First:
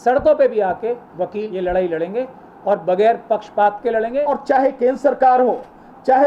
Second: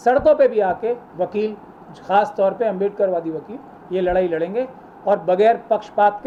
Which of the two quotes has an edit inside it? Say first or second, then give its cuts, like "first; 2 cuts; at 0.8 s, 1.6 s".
first; 2 cuts; at 1.4 s, 4.2 s